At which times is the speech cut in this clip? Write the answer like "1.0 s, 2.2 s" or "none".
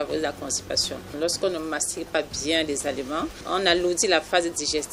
1.1 s, 3.4 s